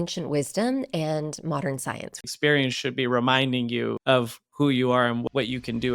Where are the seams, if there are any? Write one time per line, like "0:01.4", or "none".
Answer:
0:02.3
0:04.0
0:05.2